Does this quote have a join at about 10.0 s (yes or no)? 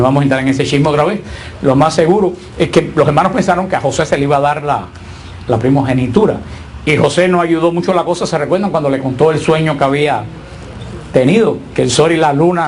no